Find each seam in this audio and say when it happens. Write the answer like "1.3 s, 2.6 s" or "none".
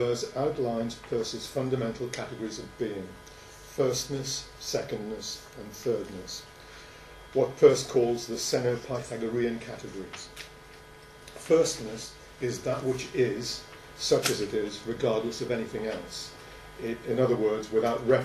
4.1 s